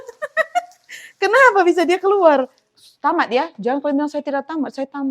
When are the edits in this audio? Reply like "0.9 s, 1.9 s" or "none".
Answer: 2.6 s